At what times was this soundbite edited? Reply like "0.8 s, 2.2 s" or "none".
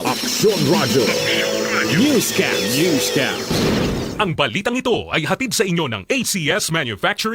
none